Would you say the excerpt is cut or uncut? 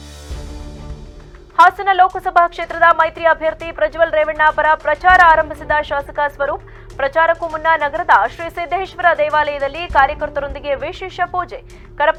uncut